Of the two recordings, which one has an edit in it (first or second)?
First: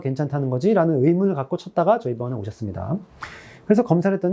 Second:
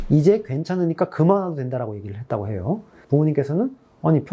second